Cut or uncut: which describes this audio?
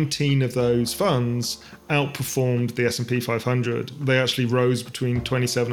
uncut